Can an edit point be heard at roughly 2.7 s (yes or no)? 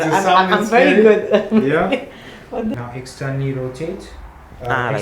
yes